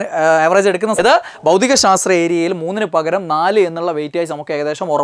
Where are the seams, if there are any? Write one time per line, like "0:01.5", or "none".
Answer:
0:01.0